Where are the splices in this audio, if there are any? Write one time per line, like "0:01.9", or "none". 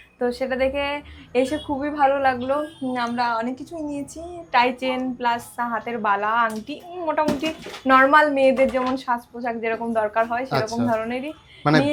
none